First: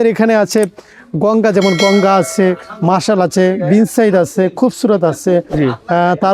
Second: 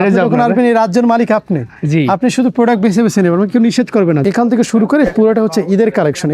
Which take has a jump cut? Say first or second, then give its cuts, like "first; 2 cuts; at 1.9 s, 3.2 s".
second; 1 cut; at 4.2 s